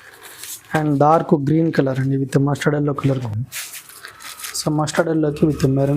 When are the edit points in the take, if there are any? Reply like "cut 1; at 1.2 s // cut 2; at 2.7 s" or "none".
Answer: cut 1; at 3.2 s